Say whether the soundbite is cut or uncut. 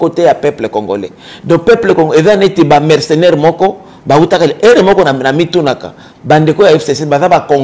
uncut